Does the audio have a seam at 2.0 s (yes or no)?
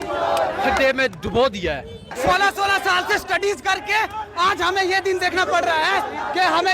yes